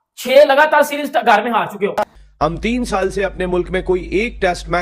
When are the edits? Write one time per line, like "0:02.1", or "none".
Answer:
0:02.0